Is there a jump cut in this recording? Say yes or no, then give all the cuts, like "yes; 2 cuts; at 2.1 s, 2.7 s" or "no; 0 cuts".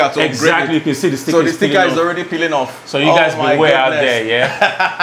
no; 0 cuts